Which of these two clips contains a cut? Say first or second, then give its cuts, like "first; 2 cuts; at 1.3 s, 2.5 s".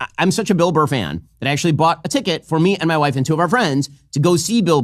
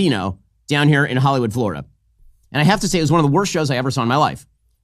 second; 1 cut; at 3.3 s